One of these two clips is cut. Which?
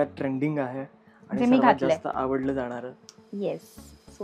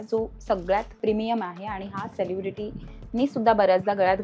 second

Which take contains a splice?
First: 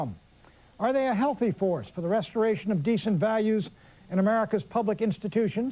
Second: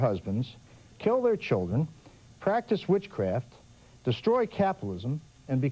first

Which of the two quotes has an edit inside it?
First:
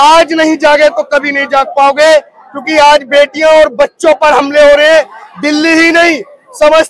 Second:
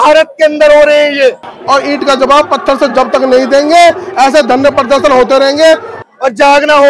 second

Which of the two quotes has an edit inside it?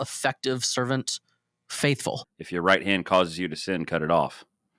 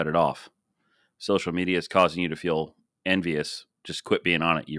first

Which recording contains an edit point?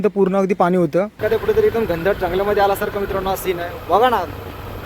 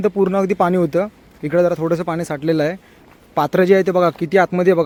first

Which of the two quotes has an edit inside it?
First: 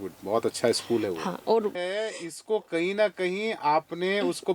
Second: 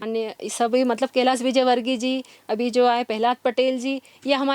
first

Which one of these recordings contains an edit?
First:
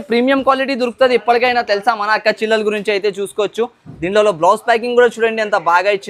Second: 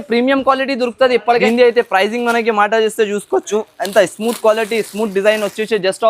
second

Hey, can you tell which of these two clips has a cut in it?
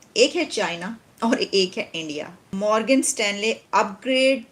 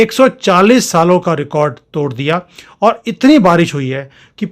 first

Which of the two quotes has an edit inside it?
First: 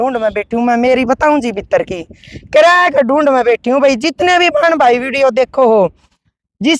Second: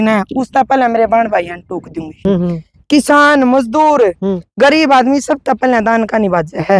second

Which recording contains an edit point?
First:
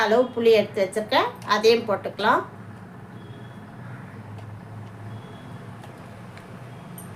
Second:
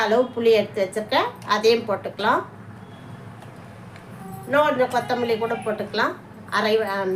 second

